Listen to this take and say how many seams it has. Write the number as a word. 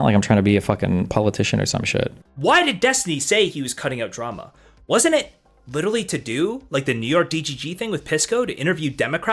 one